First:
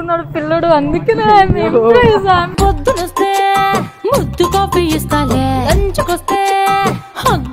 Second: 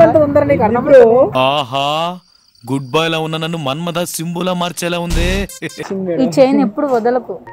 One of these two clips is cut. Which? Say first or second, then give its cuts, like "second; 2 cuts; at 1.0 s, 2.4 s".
second; 1 cut; at 5.8 s